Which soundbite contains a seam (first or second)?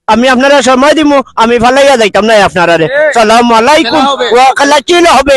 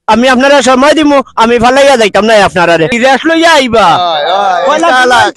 second